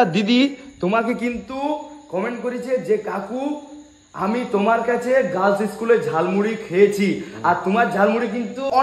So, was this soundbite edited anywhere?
no; 0 cuts

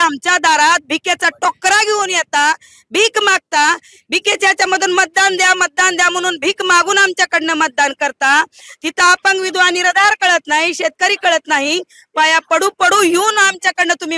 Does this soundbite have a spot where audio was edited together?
no; 0 cuts

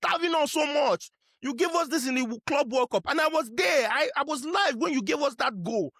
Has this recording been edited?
no; 0 cuts

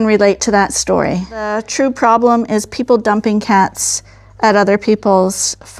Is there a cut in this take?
yes; 1 cut; at 1.6 s

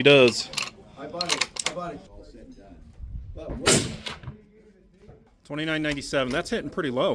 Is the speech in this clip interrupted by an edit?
yes; 2 cuts; at 2.1 s, 5.3 s

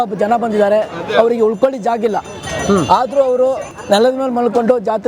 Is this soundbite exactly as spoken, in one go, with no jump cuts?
yes; 0 cuts

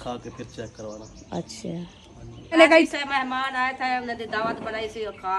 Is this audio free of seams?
no; 1 cut; at 2.6 s

